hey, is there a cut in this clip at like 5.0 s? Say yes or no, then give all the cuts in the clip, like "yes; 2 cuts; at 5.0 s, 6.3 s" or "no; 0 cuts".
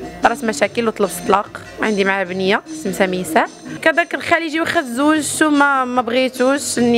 no; 1 cut; at 3.8 s